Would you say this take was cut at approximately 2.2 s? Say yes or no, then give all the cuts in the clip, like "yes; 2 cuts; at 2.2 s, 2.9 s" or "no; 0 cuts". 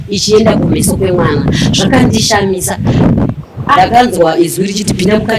no; 1 cut; at 3.8 s